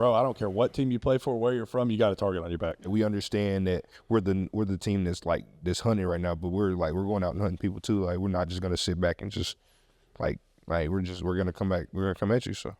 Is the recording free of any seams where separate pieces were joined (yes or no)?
no